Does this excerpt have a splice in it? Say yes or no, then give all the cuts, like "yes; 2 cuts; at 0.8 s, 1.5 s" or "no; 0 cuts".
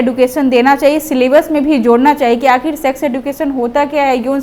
no; 0 cuts